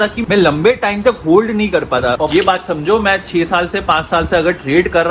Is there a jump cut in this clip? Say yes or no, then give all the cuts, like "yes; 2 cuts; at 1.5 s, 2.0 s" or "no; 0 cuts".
yes; 1 cut; at 2.3 s